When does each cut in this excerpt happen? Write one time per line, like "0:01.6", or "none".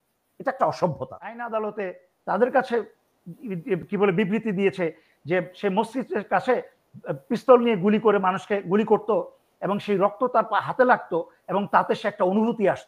0:01.4